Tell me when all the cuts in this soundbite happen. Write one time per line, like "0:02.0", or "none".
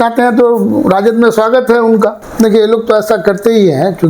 0:02.2